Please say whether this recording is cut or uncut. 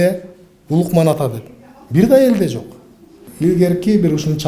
cut